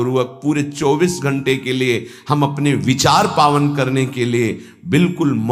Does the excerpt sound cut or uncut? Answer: uncut